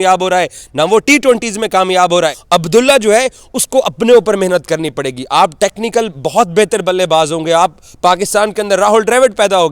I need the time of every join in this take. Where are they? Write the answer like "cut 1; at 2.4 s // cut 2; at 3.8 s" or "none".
cut 1; at 2.4 s